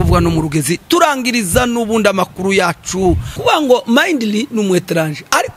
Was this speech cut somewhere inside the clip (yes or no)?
yes